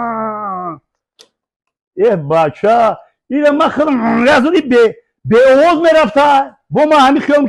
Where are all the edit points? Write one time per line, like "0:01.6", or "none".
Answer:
none